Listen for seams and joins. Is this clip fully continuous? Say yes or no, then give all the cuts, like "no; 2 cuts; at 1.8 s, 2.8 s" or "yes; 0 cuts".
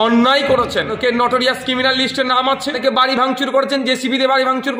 no; 2 cuts; at 0.9 s, 2.8 s